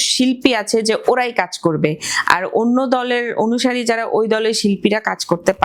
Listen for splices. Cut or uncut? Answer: uncut